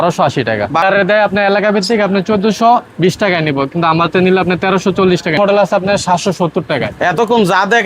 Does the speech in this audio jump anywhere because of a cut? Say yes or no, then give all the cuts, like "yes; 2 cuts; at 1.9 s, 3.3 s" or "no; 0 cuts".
yes; 2 cuts; at 0.8 s, 5.4 s